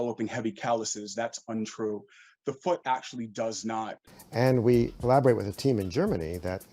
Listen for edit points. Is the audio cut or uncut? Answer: cut